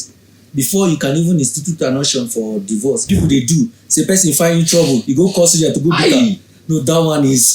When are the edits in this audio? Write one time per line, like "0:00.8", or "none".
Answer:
0:03.1